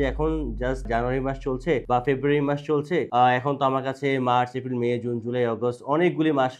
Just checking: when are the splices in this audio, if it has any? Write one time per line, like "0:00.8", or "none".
0:00.9
0:01.8
0:03.1